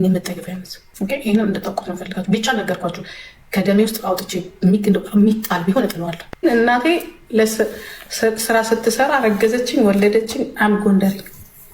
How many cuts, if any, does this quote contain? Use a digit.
1